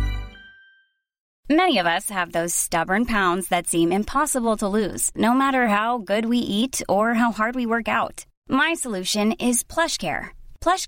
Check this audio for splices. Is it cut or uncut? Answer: cut